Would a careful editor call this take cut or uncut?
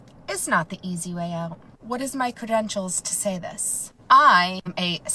cut